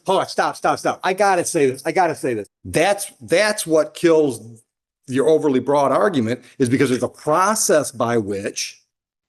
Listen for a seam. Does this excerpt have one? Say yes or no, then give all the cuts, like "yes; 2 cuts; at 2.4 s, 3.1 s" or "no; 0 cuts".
yes; 1 cut; at 2.5 s